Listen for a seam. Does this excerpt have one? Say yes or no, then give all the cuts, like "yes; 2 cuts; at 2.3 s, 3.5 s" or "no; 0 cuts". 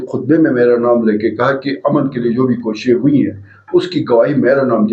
no; 0 cuts